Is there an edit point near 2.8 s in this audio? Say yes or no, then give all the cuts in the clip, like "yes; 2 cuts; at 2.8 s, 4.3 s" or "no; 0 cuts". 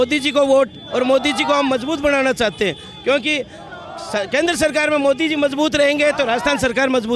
no; 0 cuts